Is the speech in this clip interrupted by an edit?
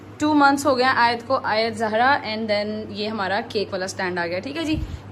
no; 0 cuts

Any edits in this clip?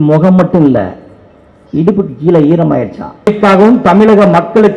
yes; 1 cut; at 3.3 s

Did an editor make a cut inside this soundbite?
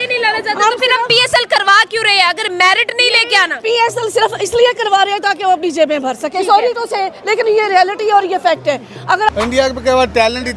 yes; 1 cut; at 9.3 s

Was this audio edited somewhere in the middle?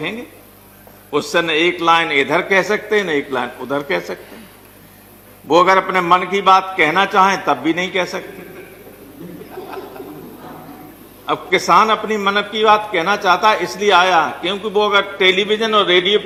no; 0 cuts

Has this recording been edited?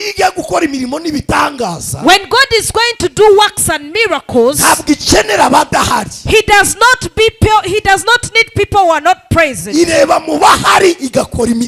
no; 0 cuts

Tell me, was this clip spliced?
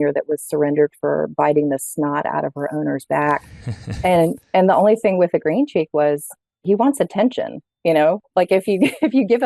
no; 0 cuts

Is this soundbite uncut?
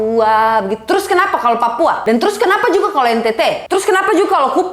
no; 2 cuts; at 2.0 s, 3.6 s

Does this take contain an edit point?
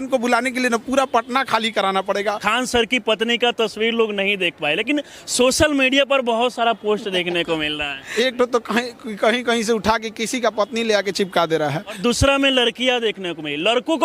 yes; 3 cuts; at 2.4 s, 8.0 s, 12.0 s

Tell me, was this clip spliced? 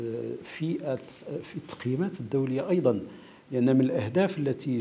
no; 0 cuts

